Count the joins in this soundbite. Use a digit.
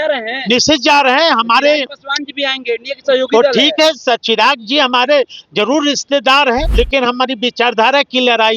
1